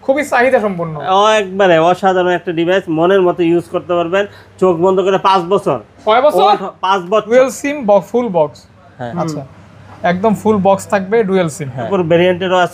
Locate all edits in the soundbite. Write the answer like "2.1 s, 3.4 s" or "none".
7.3 s, 11.9 s